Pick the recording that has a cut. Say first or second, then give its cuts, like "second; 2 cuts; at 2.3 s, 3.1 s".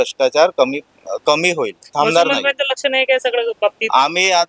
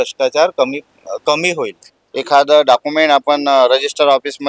second; 1 cut; at 1.8 s